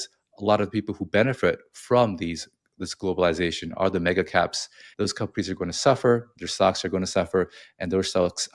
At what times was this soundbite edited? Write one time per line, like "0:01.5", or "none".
0:04.8